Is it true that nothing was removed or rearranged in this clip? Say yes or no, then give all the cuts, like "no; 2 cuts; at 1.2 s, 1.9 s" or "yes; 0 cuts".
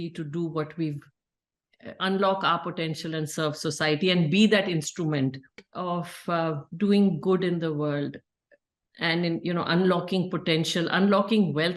no; 1 cut; at 5.7 s